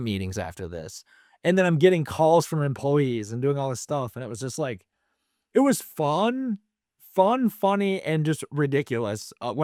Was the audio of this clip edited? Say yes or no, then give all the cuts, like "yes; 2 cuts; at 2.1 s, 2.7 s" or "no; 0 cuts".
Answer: no; 0 cuts